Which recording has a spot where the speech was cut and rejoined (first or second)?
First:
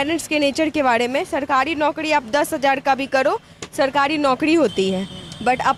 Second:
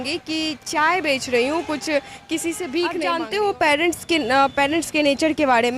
second